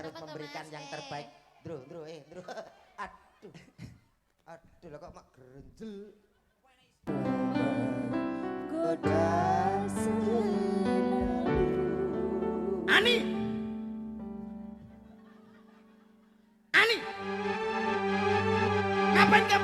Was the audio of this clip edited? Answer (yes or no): yes